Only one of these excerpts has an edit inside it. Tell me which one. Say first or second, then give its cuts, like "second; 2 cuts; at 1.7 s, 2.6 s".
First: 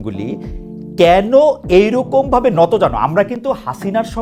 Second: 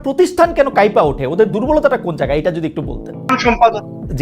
second; 1 cut; at 3.3 s